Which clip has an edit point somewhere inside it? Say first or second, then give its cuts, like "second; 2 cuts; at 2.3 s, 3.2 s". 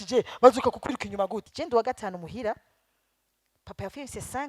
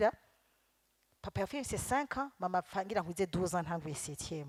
first; 1 cut; at 1.5 s